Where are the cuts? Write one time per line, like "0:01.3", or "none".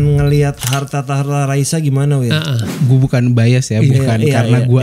0:02.7